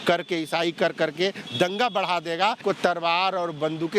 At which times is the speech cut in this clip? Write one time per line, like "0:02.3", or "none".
0:02.6